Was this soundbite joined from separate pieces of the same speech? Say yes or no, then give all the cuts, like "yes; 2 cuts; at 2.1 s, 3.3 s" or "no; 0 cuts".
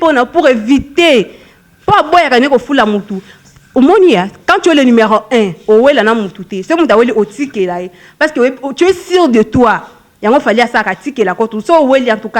no; 0 cuts